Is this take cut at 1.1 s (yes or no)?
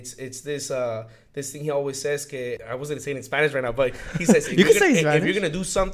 no